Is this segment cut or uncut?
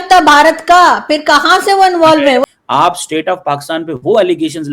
cut